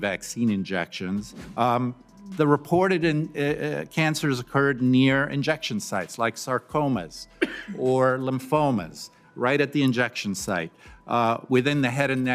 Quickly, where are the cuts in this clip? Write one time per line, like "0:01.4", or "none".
0:01.4